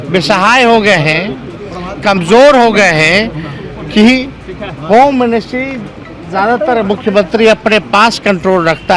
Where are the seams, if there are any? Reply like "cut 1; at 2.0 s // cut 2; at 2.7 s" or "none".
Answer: none

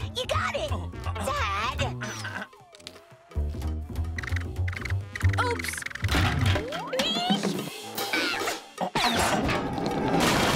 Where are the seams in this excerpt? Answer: none

